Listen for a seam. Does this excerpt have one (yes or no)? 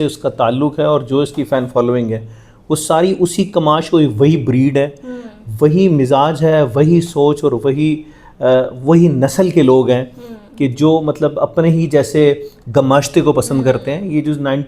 no